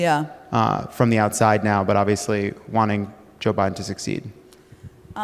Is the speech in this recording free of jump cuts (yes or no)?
yes